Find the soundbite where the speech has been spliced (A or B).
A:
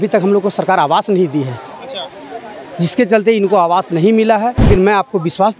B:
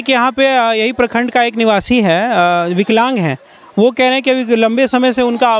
A